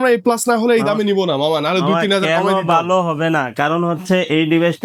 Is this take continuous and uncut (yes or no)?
yes